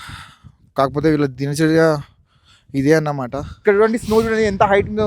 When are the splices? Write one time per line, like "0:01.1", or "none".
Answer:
0:03.5